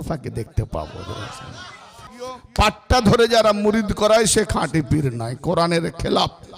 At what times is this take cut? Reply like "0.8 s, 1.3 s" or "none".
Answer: 2.2 s